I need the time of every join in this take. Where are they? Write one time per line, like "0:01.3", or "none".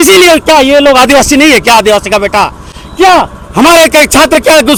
none